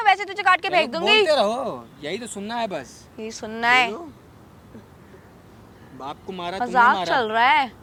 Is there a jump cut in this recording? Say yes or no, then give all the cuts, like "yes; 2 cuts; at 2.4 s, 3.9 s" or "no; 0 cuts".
no; 0 cuts